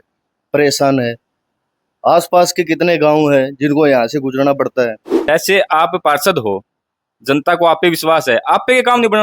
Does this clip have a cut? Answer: yes; 1 cut; at 5.1 s

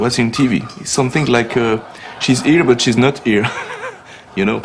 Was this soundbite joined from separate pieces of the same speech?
yes; 1 cut; at 2.6 s

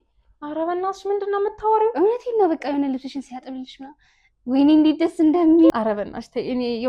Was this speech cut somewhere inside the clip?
no; 0 cuts

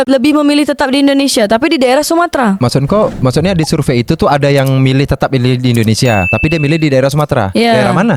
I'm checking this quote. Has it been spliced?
no; 0 cuts

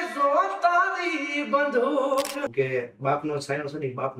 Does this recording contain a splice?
yes; 1 cut; at 2.4 s

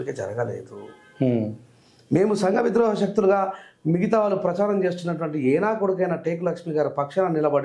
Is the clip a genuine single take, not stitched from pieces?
yes; 0 cuts

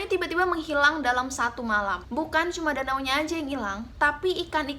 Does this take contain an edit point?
yes; 1 cut; at 2.0 s

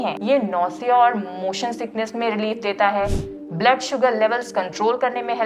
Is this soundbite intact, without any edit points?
yes; 0 cuts

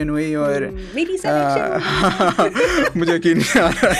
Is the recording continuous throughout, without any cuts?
yes; 0 cuts

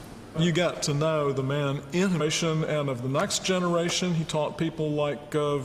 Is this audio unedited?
yes; 0 cuts

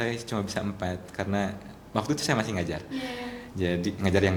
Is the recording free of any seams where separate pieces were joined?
yes; 0 cuts

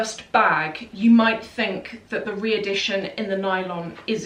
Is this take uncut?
yes; 0 cuts

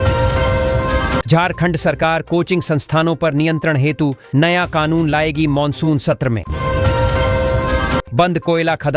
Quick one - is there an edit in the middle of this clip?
no; 0 cuts

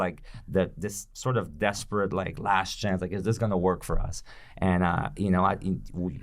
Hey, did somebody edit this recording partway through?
no; 0 cuts

